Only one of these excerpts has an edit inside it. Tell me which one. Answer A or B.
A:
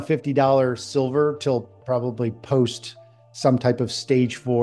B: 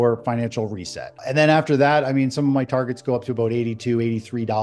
B